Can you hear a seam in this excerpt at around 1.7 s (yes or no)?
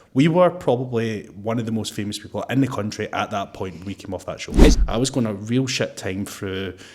no